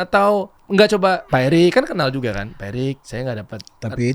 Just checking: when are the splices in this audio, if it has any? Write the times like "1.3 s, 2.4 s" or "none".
1.0 s, 3.1 s